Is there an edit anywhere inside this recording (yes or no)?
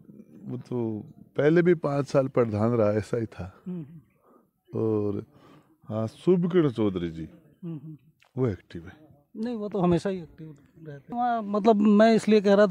yes